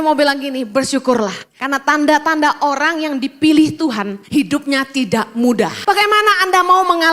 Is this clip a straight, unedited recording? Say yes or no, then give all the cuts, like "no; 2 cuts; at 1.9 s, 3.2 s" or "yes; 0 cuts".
no; 3 cuts; at 1.5 s, 4.2 s, 5.8 s